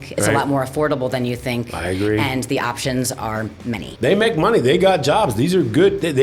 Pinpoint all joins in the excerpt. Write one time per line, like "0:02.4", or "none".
0:03.8